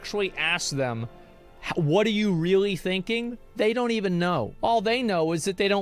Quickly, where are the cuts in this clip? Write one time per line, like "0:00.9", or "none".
0:04.5